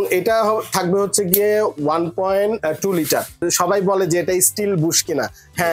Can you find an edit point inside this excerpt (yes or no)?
yes